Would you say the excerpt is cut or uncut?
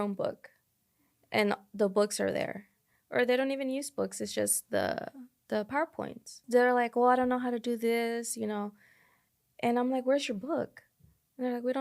cut